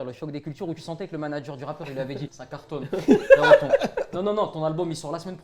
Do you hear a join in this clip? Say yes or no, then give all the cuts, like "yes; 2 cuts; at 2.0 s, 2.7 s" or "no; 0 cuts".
yes; 1 cut; at 2.4 s